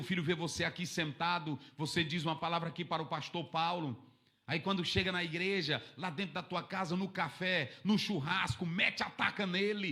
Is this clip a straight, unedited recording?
yes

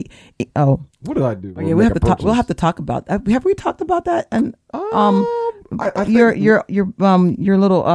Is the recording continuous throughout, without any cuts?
no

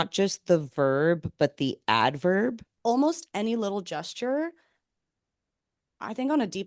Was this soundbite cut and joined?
yes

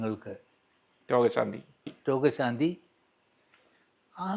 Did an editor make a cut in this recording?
no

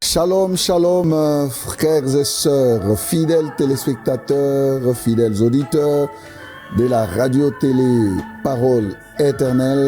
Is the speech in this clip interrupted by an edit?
yes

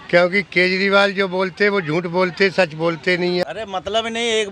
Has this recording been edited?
yes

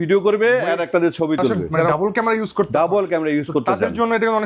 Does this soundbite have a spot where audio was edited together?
yes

